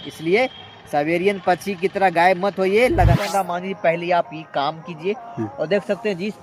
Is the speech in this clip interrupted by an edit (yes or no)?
yes